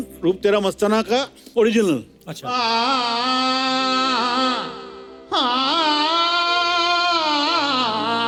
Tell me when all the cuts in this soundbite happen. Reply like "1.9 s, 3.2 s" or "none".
none